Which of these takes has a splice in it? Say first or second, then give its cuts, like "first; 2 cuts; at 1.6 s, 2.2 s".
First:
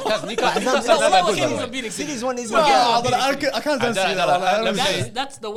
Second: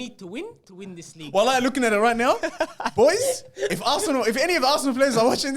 second; 1 cut; at 1.2 s